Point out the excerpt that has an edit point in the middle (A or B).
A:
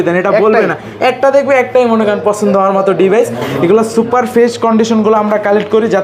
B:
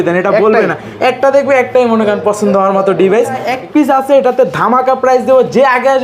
B